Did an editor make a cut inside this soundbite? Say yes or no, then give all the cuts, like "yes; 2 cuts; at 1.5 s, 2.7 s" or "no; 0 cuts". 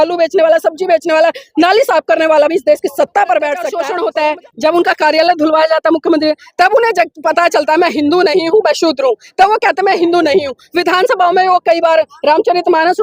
yes; 1 cut; at 3.8 s